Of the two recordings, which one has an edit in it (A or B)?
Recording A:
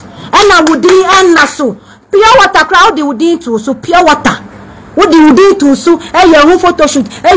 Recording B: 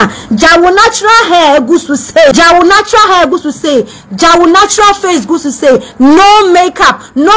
B